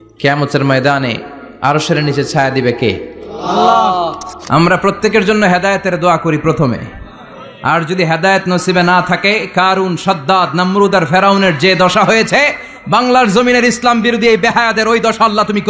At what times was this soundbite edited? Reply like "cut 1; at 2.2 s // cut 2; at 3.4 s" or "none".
cut 1; at 4.4 s